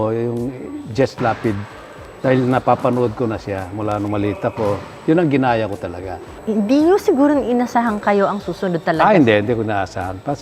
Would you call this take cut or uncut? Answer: uncut